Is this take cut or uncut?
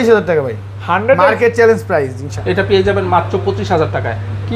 cut